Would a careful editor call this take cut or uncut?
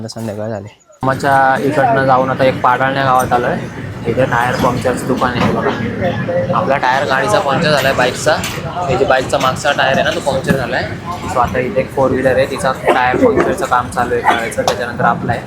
cut